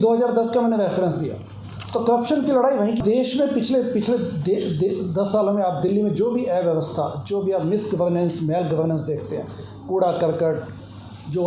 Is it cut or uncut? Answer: cut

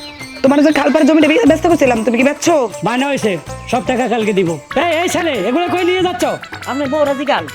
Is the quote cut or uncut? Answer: cut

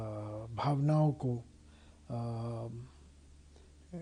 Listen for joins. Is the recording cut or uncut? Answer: uncut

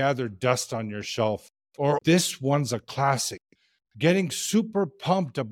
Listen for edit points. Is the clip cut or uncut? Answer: cut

